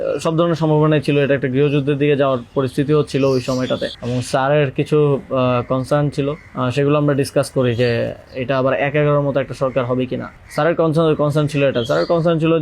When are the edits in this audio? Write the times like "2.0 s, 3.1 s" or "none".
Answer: 4.0 s, 10.3 s